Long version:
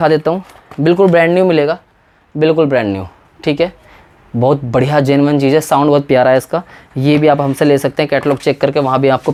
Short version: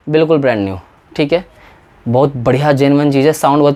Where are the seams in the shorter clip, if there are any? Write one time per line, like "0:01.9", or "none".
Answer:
none